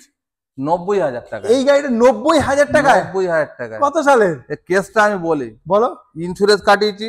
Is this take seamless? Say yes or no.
yes